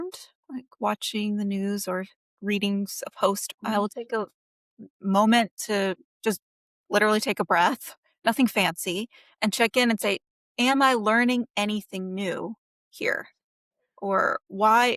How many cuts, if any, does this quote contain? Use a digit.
1